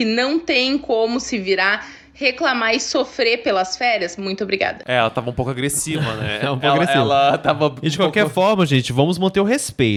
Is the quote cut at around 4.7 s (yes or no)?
no